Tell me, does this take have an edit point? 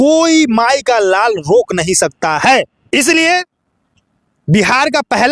yes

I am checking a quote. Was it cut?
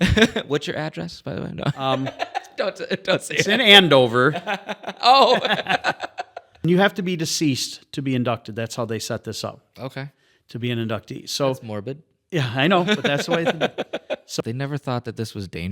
yes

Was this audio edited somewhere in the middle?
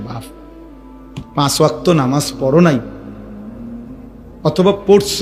no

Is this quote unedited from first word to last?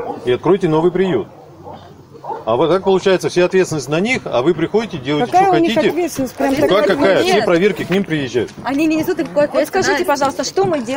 yes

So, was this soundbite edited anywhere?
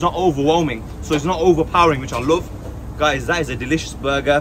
no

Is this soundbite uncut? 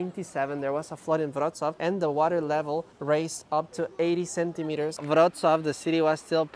no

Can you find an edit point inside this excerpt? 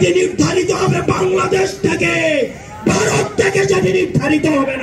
no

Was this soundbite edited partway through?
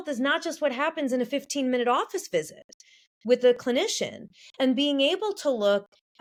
no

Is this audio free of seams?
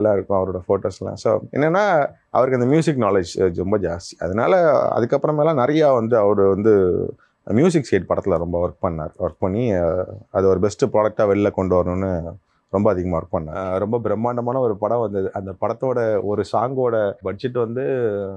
no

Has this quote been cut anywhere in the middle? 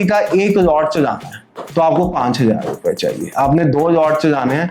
no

